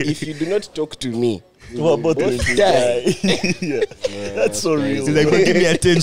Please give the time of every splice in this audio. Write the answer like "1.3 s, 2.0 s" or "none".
none